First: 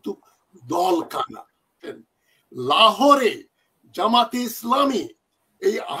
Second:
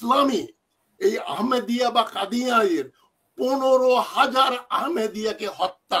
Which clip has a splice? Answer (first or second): first